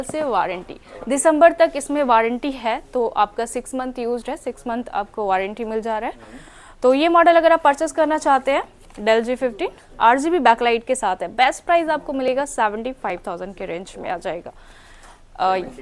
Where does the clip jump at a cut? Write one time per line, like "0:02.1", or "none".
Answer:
none